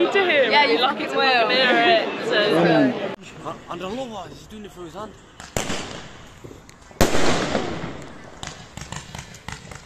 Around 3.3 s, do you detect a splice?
yes; 1 cut; at 3.3 s

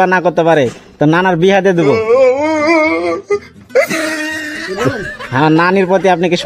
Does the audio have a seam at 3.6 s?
no; 2 cuts; at 2.0 s, 5.0 s

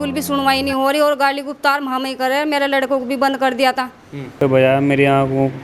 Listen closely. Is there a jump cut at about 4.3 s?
yes; 1 cut; at 4.3 s

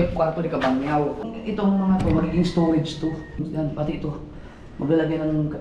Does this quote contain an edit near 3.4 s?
yes; 2 cuts; at 1.2 s, 3.4 s

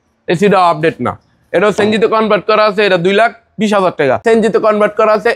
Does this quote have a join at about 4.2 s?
yes; 1 cut; at 4.2 s

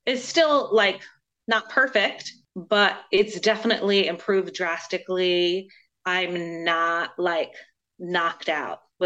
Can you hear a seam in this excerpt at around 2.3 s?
yes; 1 cut; at 2.3 s

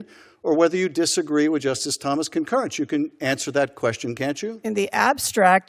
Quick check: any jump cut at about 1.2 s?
no; 0 cuts

